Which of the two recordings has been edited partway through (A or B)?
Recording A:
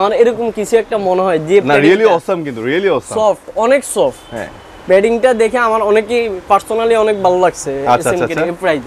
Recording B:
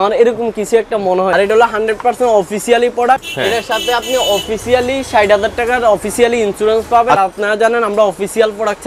B